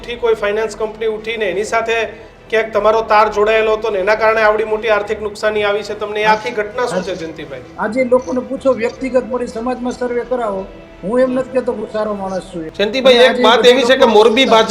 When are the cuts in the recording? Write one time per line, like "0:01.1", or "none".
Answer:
0:07.6
0:12.6